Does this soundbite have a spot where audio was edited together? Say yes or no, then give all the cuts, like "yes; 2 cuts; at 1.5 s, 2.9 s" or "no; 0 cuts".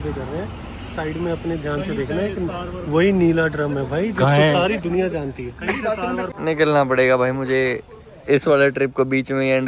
yes; 1 cut; at 6.3 s